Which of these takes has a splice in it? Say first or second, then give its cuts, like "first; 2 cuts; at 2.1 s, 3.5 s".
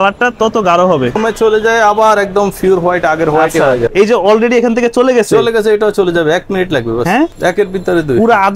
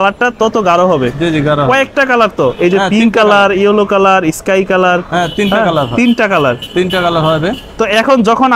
first; 3 cuts; at 1.2 s, 3.9 s, 7.4 s